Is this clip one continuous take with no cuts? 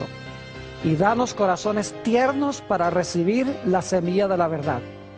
no; 1 cut; at 1.0 s

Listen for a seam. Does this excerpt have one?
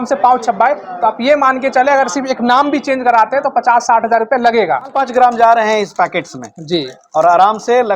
yes; 1 cut; at 5.0 s

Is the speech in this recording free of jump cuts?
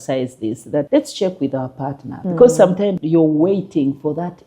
no; 3 cuts; at 0.9 s, 2.1 s, 3.0 s

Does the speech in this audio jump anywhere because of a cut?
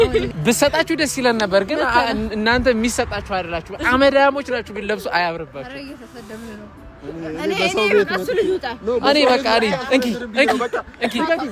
no; 0 cuts

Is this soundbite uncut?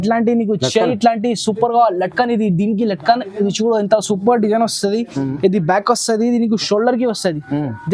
yes; 0 cuts

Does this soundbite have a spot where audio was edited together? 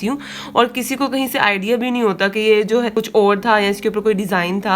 yes; 1 cut; at 2.9 s

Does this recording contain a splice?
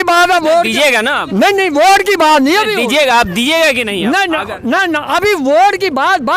no; 0 cuts

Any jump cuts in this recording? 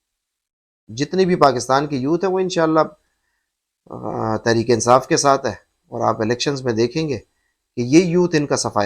no; 0 cuts

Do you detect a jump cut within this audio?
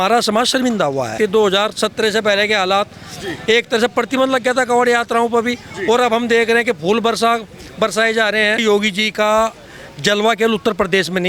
yes; 2 cuts; at 1.1 s, 8.6 s

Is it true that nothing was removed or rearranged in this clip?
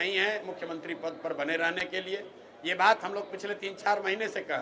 yes; 0 cuts

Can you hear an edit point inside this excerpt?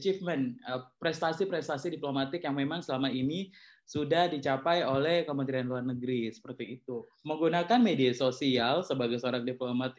yes; 1 cut; at 7.1 s

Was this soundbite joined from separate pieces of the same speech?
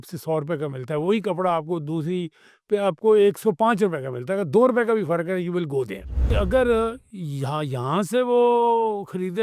yes; 1 cut; at 6.3 s

